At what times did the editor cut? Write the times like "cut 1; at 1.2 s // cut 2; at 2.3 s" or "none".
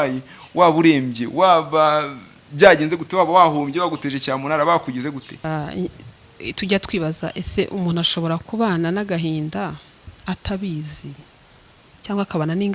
cut 1; at 5.4 s

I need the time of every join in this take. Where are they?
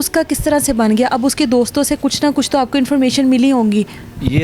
none

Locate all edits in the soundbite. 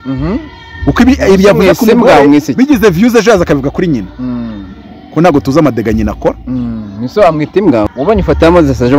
cut 1; at 7.9 s

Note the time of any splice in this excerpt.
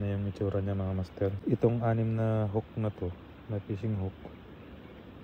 cut 1; at 1.4 s

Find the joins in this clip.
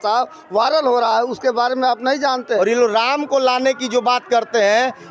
cut 1; at 2.6 s

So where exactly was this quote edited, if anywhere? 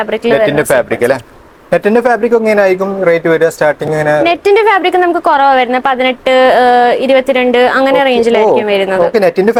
none

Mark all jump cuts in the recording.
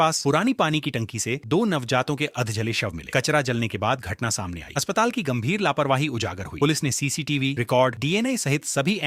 none

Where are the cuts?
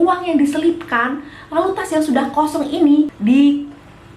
cut 1; at 3.1 s

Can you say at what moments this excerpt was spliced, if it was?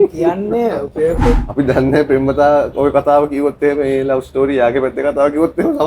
cut 1; at 1.3 s

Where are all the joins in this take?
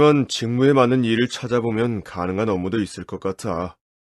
none

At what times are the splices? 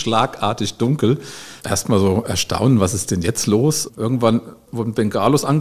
cut 1; at 1.5 s // cut 2; at 3.8 s // cut 3; at 4.7 s

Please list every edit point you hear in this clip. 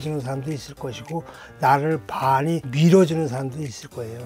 cut 1; at 2.7 s

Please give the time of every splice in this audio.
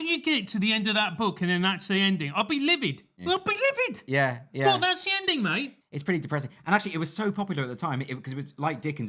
none

